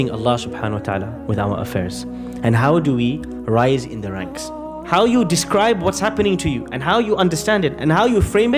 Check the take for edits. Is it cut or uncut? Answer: cut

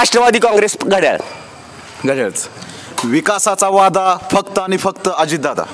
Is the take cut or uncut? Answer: uncut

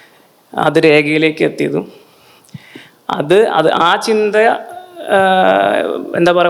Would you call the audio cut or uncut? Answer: uncut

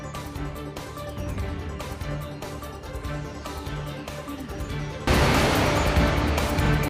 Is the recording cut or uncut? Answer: cut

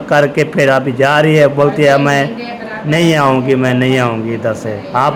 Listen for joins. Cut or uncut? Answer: uncut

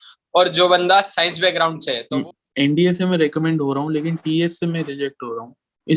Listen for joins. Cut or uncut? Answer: cut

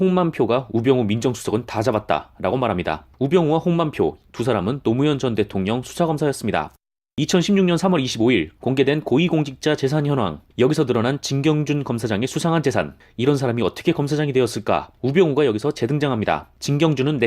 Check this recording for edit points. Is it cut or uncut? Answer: cut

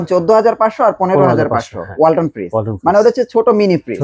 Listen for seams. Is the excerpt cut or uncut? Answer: uncut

